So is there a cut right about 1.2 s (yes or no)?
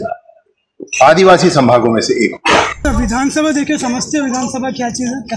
no